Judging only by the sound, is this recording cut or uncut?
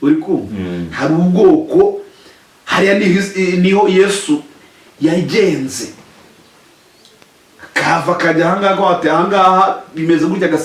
uncut